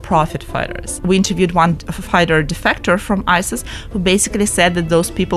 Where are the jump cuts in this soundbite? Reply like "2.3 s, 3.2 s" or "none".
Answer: 0.9 s